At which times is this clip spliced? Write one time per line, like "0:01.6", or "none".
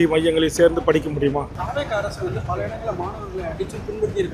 0:01.6